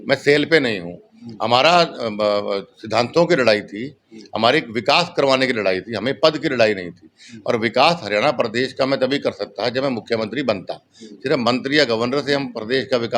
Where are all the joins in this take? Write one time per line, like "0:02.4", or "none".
none